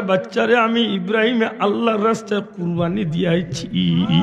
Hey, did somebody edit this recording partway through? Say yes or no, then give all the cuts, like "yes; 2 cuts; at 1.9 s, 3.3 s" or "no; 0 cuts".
no; 0 cuts